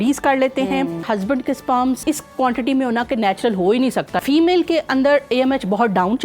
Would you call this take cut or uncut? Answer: cut